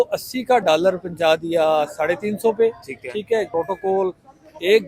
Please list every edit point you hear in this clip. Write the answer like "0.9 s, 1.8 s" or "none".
3.5 s